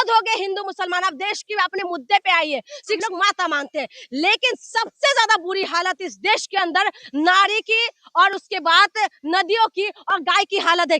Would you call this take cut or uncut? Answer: cut